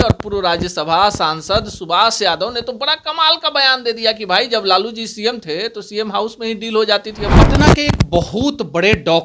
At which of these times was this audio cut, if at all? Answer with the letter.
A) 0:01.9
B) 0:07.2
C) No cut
B